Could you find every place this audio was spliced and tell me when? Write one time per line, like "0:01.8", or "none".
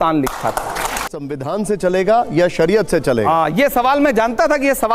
0:01.0